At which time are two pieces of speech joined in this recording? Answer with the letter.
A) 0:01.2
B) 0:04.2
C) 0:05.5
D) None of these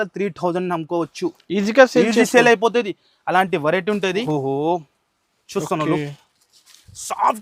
B